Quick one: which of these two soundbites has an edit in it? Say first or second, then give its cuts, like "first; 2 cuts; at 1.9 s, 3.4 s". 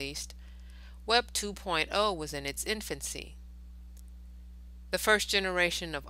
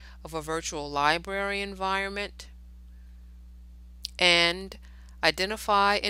second; 1 cut; at 2.0 s